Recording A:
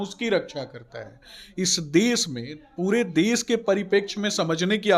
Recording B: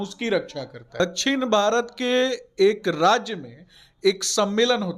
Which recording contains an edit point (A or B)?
B